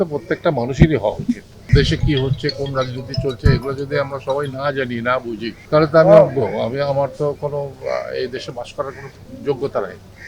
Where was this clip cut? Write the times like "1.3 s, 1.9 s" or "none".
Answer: 1.7 s, 5.5 s

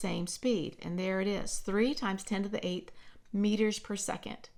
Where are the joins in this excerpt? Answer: none

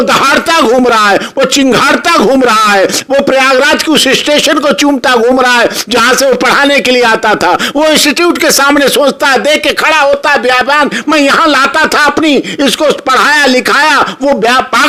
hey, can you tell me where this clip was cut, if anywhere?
none

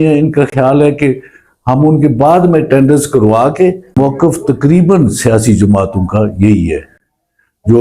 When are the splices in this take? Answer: 4.0 s

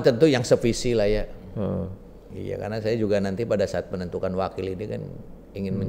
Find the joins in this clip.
none

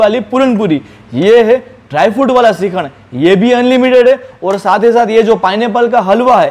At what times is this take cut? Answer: none

